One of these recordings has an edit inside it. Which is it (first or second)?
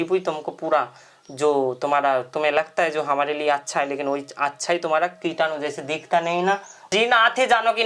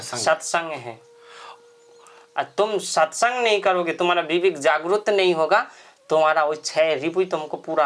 first